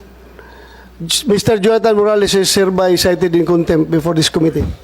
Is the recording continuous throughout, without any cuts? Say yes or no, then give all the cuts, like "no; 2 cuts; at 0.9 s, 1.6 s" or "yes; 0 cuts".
yes; 0 cuts